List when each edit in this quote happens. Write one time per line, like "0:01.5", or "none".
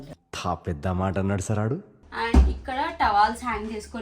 0:01.9